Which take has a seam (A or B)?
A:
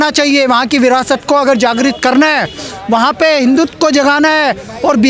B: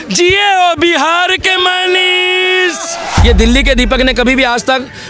B